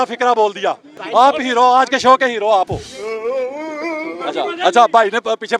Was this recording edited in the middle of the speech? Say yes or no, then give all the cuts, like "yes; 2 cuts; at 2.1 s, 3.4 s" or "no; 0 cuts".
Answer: yes; 2 cuts; at 2.9 s, 4.2 s